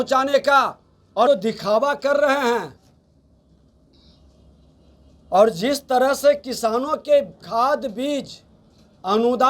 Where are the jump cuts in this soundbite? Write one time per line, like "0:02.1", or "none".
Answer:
0:01.3